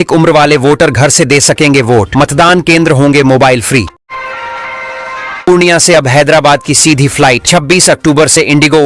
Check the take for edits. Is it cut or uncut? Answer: cut